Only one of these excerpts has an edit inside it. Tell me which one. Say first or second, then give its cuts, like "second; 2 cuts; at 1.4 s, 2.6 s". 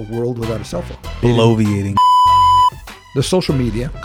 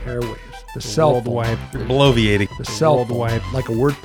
first; 3 cuts; at 1.1 s, 1.8 s, 2.9 s